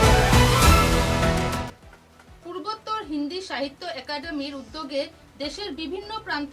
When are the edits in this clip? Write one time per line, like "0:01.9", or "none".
0:01.6